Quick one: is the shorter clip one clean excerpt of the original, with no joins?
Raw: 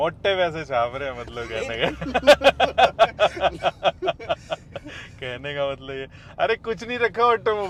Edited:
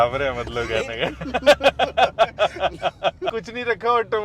no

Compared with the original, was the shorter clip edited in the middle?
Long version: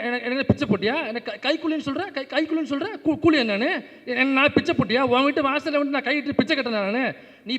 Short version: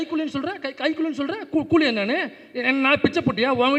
no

